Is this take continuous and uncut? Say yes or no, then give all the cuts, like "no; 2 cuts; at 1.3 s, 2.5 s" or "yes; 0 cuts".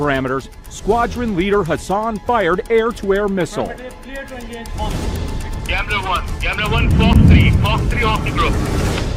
yes; 0 cuts